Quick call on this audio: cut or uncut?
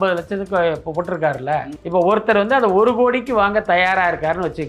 cut